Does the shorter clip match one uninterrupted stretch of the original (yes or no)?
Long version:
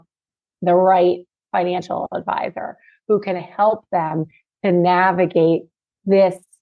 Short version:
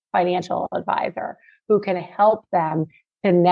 yes